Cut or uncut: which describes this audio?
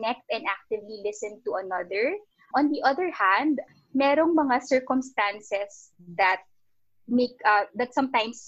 cut